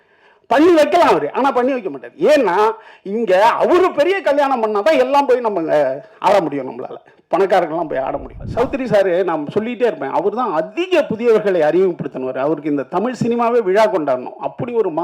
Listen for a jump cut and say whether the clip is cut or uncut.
cut